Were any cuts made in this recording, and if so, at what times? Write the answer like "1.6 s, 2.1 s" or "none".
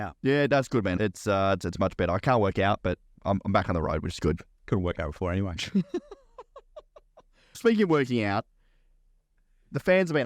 1.0 s, 3.1 s, 7.6 s